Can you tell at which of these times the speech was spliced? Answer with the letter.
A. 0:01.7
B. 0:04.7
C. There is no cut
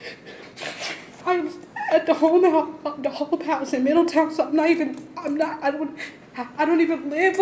C